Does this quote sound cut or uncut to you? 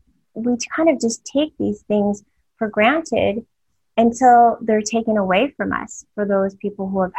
uncut